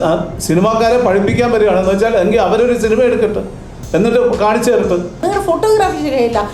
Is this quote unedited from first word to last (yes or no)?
no